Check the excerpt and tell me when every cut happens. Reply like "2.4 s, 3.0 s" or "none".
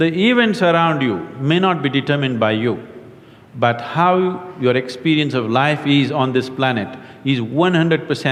none